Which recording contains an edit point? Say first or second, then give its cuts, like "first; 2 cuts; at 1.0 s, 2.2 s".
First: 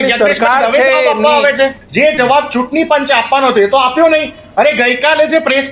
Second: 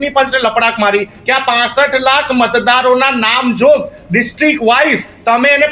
first; 1 cut; at 1.8 s